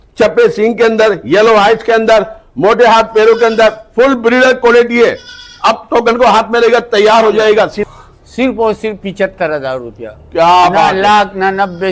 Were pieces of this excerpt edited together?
yes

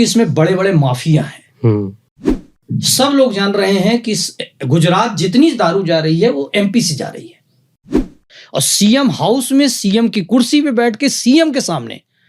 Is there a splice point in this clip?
yes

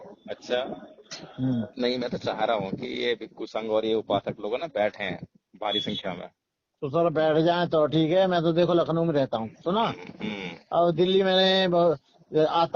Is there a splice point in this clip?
yes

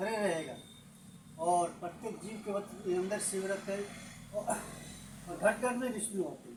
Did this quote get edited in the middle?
no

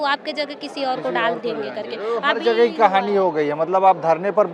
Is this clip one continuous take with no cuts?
yes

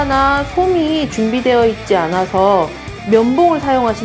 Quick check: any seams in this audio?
no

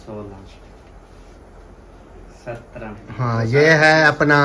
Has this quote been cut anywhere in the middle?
yes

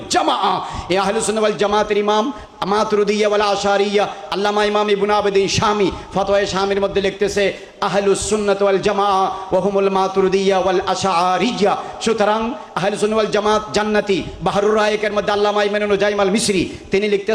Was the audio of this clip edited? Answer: no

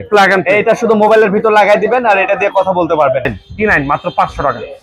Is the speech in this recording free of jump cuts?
no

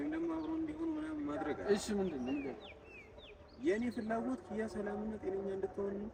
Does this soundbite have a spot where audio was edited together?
no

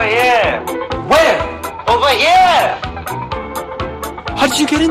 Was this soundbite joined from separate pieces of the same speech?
no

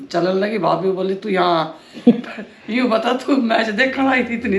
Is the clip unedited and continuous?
yes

